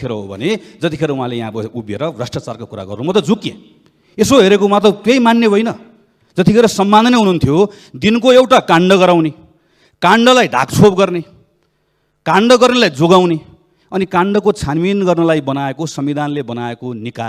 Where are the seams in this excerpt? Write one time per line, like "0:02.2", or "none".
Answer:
none